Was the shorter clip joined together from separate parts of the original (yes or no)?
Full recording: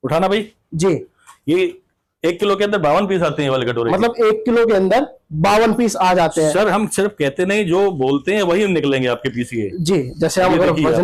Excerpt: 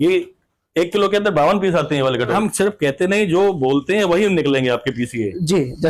yes